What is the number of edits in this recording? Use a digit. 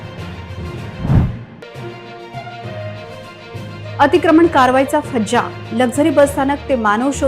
1